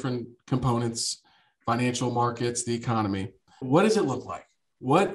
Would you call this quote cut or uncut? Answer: cut